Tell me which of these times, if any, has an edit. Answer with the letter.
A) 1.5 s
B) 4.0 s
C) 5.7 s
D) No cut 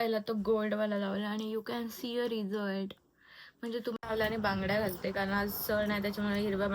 B